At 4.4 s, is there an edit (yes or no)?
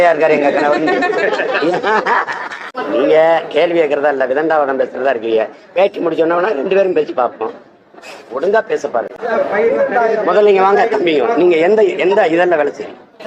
no